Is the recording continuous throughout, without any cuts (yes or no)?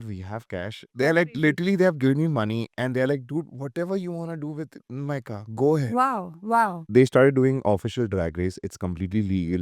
no